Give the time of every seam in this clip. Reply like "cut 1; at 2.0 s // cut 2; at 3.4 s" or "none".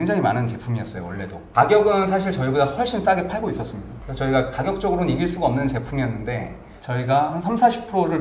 cut 1; at 1.3 s // cut 2; at 6.6 s